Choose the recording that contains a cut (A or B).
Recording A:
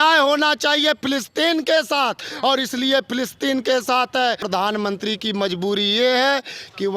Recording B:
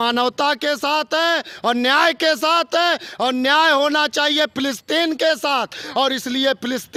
A